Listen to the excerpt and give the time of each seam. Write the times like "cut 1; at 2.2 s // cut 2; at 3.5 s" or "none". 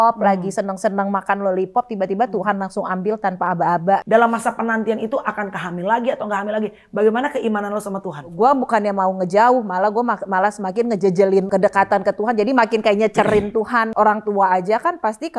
cut 1; at 4.0 s // cut 2; at 8.3 s // cut 3; at 11.5 s // cut 4; at 13.9 s